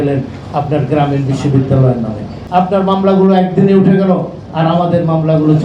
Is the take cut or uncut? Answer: cut